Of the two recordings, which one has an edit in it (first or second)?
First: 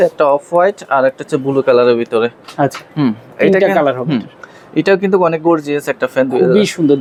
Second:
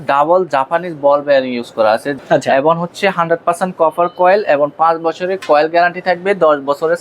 second